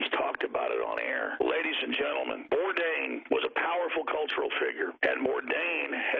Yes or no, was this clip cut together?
yes